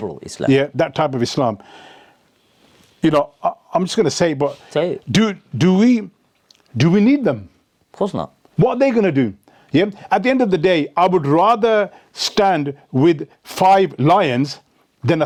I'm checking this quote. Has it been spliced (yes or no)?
no